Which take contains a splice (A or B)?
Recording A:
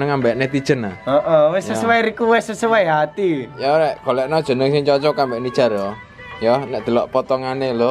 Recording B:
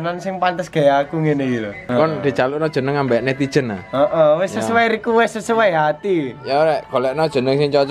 B